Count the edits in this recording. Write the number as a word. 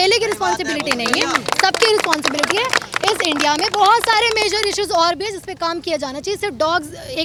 zero